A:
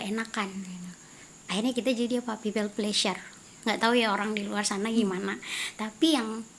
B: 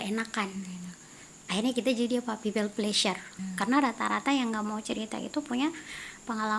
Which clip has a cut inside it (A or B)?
B